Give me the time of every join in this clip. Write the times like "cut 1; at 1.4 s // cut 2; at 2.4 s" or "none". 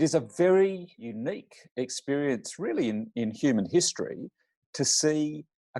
cut 1; at 1.1 s